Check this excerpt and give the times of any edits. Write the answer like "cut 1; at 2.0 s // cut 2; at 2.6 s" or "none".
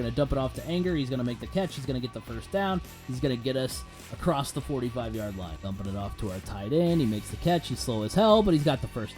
cut 1; at 5.5 s